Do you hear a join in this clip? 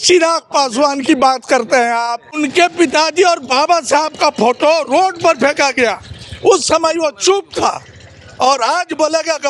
yes; 1 cut; at 2.2 s

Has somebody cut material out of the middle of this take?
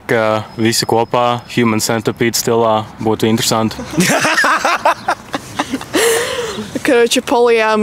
no; 0 cuts

